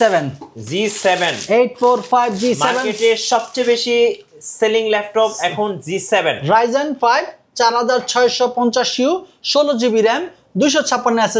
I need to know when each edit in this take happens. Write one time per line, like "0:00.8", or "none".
none